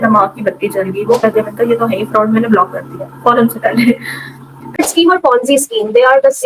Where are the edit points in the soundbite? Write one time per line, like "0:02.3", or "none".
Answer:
0:01.2
0:04.8